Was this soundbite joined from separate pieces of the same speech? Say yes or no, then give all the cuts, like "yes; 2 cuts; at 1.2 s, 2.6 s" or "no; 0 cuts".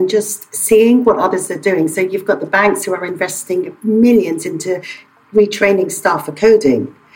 no; 0 cuts